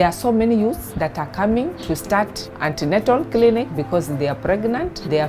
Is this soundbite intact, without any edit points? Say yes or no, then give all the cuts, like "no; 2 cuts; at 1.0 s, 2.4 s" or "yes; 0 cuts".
yes; 0 cuts